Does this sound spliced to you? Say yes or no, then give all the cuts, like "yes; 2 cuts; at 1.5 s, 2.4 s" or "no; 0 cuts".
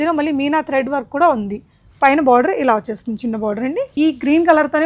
yes; 1 cut; at 3.9 s